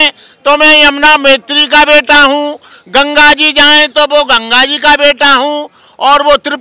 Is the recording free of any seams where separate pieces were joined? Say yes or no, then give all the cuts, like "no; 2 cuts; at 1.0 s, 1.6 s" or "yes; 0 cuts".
yes; 0 cuts